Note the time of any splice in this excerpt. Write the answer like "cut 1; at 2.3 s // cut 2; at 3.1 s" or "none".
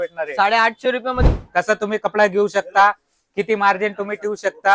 cut 1; at 1.2 s